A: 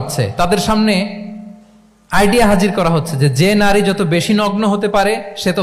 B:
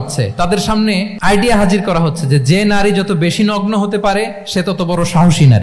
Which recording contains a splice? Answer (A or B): B